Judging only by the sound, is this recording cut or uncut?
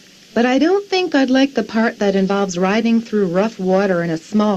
uncut